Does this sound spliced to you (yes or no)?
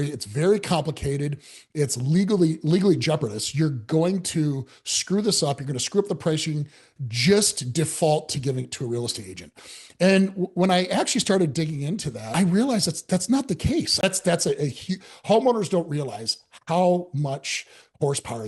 yes